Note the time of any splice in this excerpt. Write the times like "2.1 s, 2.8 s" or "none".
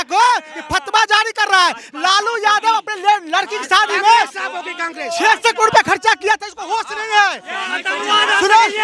none